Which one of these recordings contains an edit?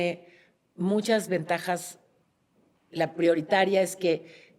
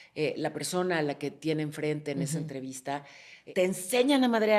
second; 1 cut; at 3.4 s

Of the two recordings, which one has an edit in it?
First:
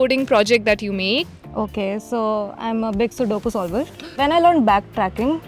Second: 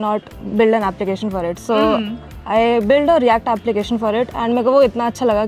first; 2 cuts; at 1.4 s, 4.2 s

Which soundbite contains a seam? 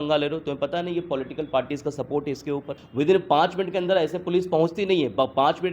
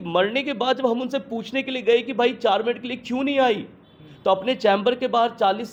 first; 1 cut; at 2.8 s

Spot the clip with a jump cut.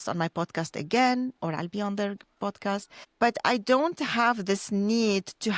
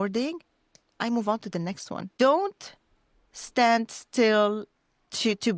second; 1 cut; at 2.1 s

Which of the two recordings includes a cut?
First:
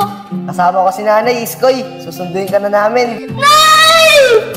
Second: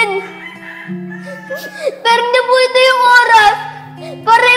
first; 1 cut; at 3.2 s

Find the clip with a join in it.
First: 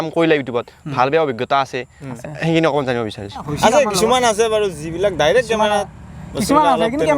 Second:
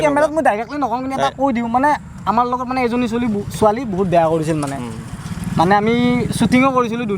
first; 1 cut; at 3.5 s

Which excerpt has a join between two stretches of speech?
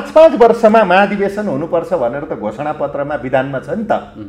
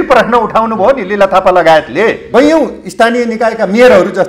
second; 1 cut; at 2.2 s

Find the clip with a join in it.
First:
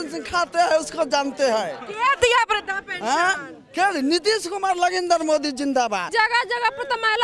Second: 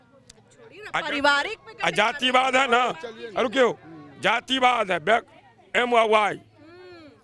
first; 1 cut; at 6.1 s

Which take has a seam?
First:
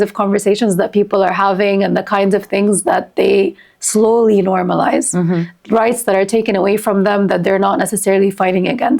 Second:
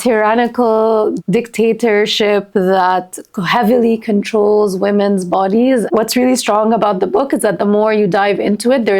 second; 2 cuts; at 1.2 s, 5.9 s

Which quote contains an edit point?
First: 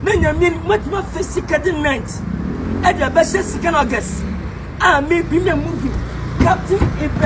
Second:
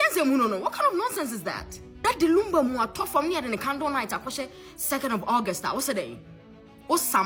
first; 1 cut; at 1.5 s

